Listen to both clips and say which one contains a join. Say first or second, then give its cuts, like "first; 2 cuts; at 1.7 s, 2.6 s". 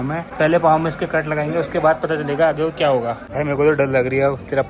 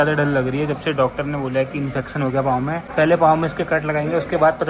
first; 1 cut; at 3.2 s